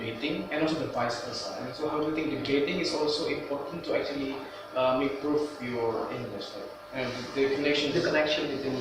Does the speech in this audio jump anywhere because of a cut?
no; 0 cuts

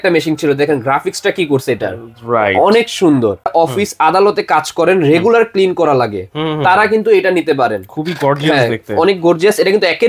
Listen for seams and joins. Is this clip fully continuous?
no; 1 cut; at 3.5 s

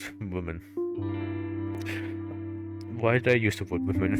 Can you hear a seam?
no; 0 cuts

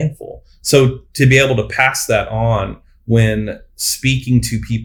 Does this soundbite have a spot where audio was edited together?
no; 0 cuts

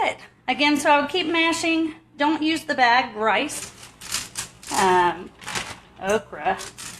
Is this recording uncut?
no; 1 cut; at 3.6 s

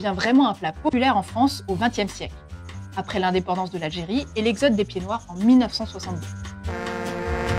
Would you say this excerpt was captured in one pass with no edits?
no; 1 cut; at 0.9 s

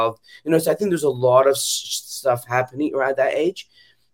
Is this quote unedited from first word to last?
yes; 0 cuts

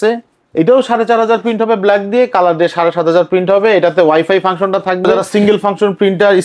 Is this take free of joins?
no; 1 cut; at 5.3 s

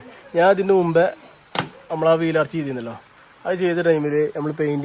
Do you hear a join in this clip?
no; 0 cuts

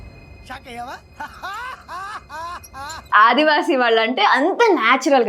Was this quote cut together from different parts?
yes; 1 cut; at 3.1 s

